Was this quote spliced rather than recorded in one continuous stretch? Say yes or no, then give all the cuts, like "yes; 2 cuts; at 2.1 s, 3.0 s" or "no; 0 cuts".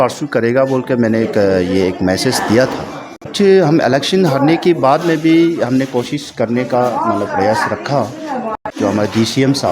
yes; 2 cuts; at 3.3 s, 8.6 s